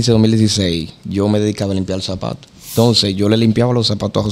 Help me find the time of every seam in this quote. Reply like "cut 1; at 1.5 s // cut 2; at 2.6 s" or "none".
cut 1; at 2.7 s

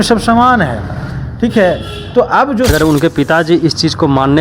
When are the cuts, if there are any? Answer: cut 1; at 2.7 s

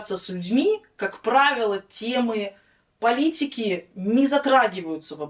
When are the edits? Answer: none

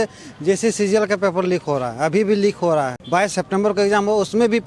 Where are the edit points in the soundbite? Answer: cut 1; at 3.2 s

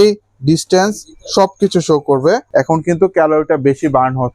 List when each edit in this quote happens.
cut 1; at 2.4 s

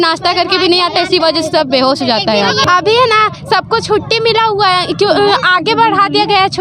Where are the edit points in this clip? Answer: cut 1; at 2.6 s

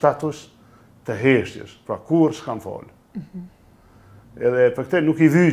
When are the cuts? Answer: none

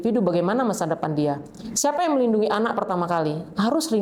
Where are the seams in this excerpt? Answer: none

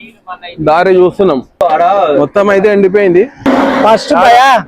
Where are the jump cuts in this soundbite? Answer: cut 1; at 1.6 s // cut 2; at 3.5 s

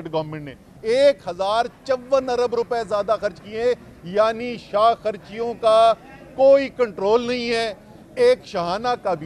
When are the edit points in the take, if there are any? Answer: none

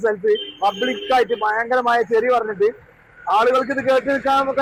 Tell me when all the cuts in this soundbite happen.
none

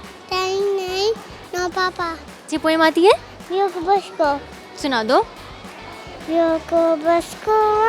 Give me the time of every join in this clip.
cut 1; at 2.3 s

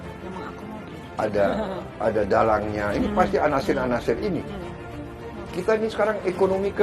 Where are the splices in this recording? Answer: cut 1; at 5.0 s

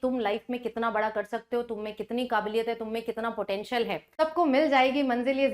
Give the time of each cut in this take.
cut 1; at 4.1 s

